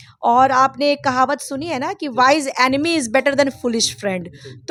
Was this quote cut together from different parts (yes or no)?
no